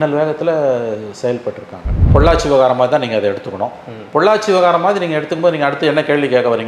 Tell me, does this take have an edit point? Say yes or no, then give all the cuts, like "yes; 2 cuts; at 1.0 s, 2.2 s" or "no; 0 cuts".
yes; 1 cut; at 2.0 s